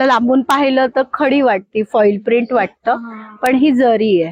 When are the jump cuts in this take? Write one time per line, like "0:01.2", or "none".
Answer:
none